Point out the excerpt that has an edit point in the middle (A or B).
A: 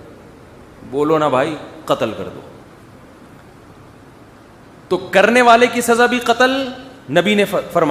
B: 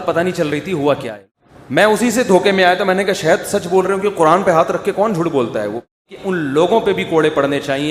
B